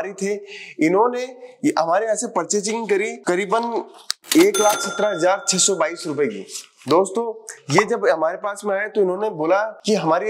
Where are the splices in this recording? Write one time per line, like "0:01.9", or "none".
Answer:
none